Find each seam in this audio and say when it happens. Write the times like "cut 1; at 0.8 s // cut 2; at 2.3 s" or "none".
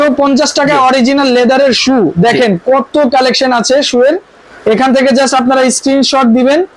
none